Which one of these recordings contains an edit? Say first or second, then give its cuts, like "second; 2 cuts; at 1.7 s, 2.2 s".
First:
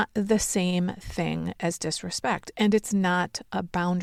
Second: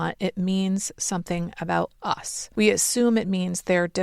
second; 1 cut; at 2.4 s